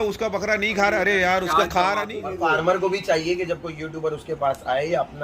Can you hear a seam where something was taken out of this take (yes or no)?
yes